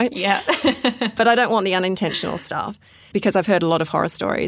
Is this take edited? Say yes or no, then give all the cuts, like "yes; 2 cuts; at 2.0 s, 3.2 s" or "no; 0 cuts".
no; 0 cuts